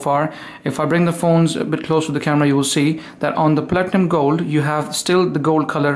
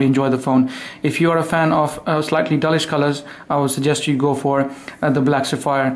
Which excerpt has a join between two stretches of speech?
first; 1 cut; at 2.7 s

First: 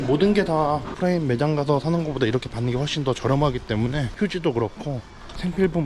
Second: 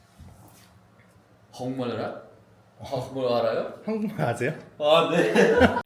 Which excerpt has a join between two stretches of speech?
first; 2 cuts; at 1.0 s, 4.1 s

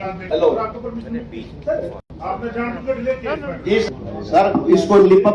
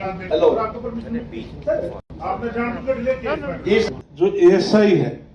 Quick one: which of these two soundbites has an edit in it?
second; 1 cut; at 4.0 s

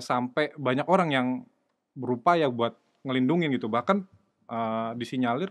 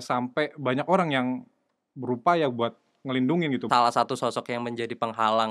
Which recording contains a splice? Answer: second; 1 cut; at 3.6 s

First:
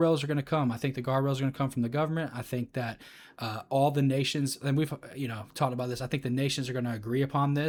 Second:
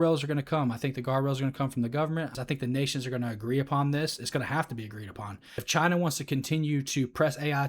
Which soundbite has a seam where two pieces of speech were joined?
second; 2 cuts; at 2.4 s, 5.6 s

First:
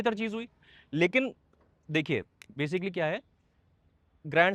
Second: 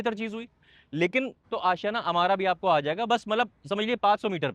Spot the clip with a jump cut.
second; 1 cut; at 1.4 s

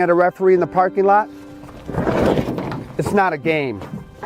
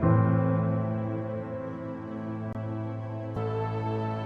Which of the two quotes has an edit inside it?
second; 1 cut; at 2.5 s

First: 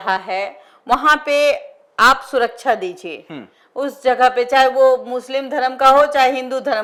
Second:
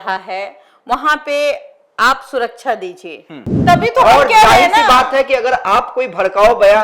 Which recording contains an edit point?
second; 1 cut; at 3.6 s

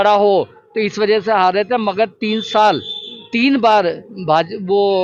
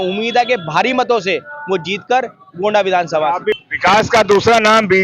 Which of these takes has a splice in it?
second; 1 cut; at 3.6 s

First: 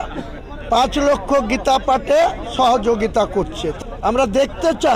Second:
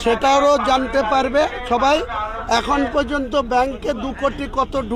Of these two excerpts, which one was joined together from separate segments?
first; 1 cut; at 3.7 s

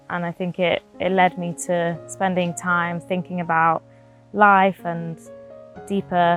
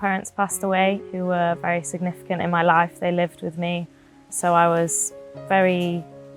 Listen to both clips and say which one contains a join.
second; 1 cut; at 4.3 s

